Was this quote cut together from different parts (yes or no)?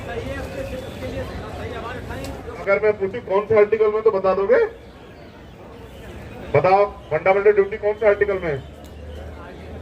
yes